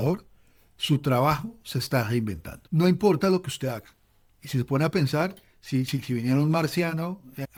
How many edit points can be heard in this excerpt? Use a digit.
0